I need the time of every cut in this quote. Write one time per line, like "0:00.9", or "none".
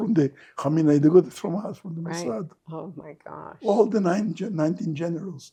none